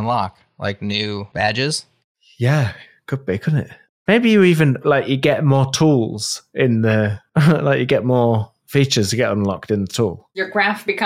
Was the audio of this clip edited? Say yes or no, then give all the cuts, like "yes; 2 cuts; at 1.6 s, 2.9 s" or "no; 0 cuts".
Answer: yes; 2 cuts; at 1.3 s, 7.2 s